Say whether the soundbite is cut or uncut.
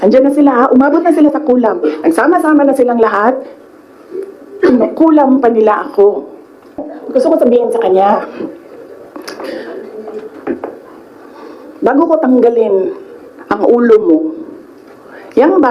cut